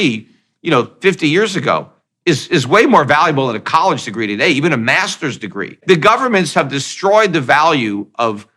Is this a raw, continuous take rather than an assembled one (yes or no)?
no